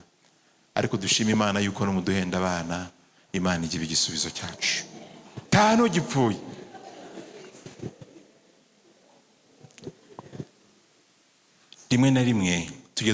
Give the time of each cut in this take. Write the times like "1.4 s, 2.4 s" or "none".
5.5 s